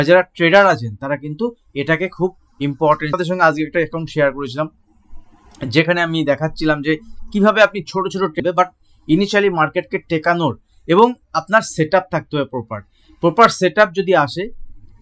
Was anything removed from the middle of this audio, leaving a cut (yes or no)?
yes